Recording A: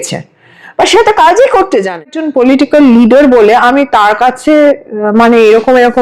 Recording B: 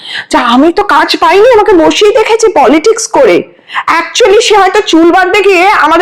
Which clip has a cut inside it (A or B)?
A